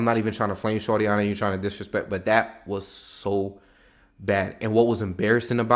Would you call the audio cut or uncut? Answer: uncut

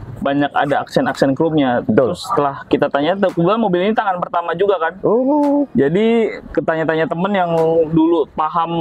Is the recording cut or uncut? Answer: uncut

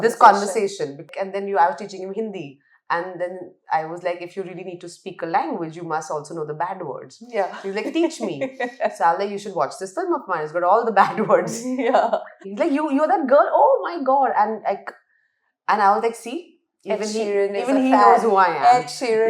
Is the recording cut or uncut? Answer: cut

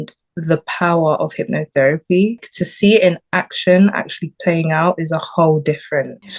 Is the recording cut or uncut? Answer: uncut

